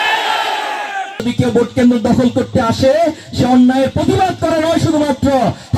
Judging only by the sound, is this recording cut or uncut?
cut